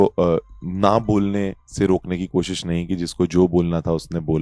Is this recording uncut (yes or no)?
yes